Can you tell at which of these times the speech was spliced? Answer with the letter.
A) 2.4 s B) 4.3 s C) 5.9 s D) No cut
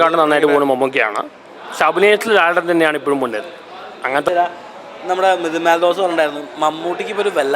B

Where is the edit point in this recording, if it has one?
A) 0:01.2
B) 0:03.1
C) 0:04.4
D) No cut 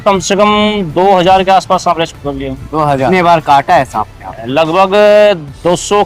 B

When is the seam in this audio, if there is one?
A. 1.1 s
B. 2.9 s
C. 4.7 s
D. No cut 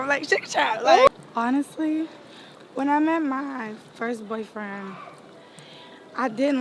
A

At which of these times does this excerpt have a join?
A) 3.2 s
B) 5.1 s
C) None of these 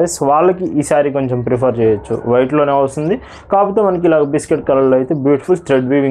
C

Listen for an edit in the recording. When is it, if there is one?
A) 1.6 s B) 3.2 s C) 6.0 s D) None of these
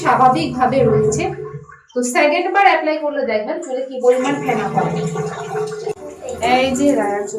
C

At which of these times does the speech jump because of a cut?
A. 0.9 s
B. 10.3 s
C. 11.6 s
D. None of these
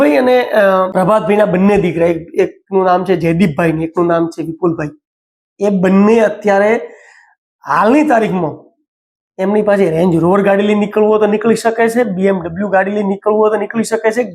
A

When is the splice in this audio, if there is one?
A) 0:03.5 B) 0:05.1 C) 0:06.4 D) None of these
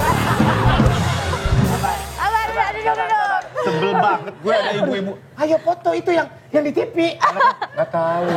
A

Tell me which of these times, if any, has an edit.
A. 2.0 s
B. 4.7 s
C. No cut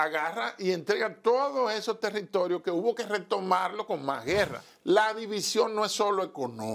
B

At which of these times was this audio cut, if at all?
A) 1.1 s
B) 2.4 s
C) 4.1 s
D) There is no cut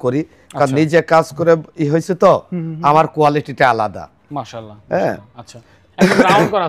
D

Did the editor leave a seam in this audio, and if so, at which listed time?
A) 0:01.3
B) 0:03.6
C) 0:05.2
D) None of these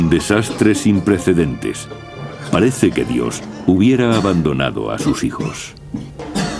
C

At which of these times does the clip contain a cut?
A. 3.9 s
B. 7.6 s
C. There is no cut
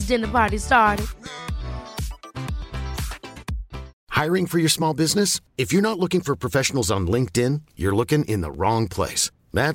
A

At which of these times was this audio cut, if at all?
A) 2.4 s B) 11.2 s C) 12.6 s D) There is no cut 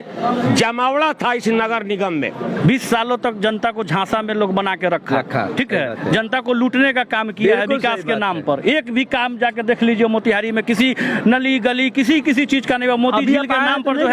A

